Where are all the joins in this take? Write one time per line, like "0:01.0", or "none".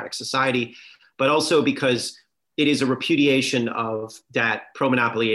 none